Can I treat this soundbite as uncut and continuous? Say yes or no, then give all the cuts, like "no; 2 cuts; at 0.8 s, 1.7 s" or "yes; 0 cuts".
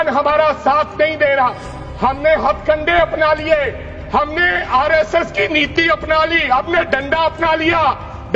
yes; 0 cuts